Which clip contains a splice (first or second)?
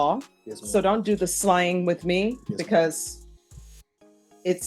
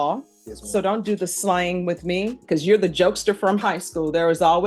second